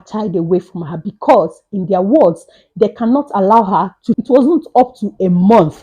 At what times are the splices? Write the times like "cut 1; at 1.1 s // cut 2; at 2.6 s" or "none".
cut 1; at 4.2 s